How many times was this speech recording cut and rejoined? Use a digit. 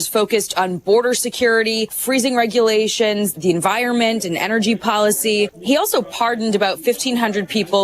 3